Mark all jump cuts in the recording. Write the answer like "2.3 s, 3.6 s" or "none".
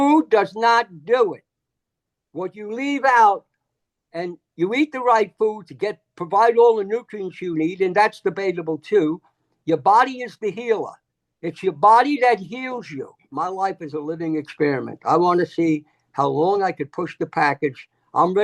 13.3 s